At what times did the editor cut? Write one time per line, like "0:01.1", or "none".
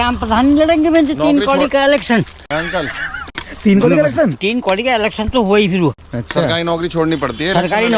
none